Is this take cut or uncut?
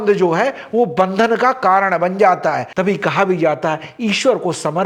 cut